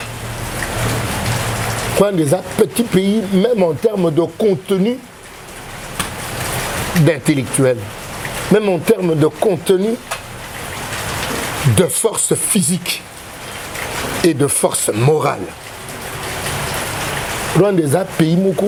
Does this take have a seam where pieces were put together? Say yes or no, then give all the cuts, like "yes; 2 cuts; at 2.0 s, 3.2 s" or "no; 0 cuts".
no; 0 cuts